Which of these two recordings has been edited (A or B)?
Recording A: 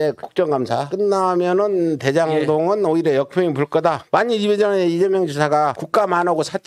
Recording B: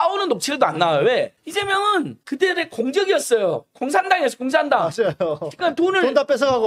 A